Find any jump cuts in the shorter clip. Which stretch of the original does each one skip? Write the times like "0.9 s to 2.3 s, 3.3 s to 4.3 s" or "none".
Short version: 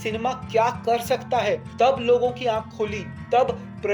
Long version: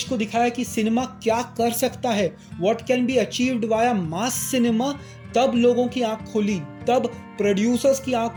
2.4 s to 5.2 s